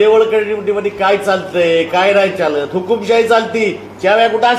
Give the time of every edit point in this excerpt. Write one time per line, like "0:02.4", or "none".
none